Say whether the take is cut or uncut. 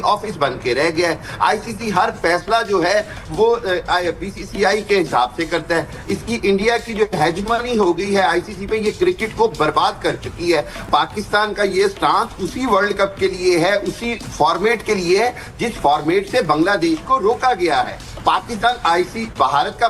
uncut